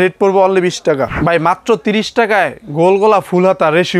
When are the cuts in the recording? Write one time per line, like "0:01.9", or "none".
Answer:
0:01.1